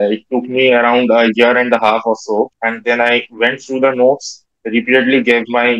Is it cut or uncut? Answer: cut